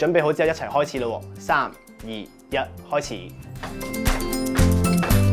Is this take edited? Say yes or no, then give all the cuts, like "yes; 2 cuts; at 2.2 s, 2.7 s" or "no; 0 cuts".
yes; 1 cut; at 3.7 s